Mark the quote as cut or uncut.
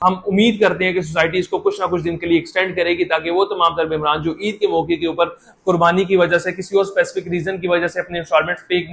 uncut